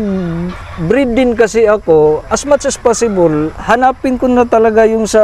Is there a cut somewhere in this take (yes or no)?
no